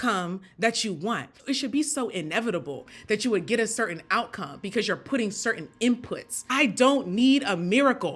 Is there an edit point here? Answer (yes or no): yes